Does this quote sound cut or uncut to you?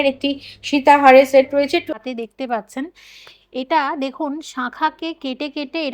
cut